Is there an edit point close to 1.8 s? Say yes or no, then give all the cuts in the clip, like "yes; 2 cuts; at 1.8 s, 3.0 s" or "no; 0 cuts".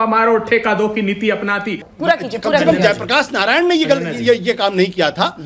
yes; 1 cut; at 1.8 s